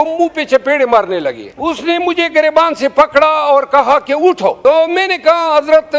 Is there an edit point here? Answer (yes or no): yes